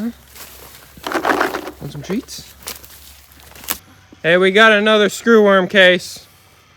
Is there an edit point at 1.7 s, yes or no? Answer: no